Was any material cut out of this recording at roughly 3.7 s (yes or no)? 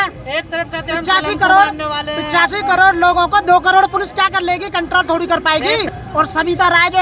no